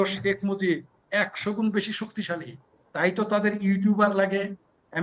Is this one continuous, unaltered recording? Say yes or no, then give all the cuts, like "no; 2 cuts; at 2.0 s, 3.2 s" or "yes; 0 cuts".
yes; 0 cuts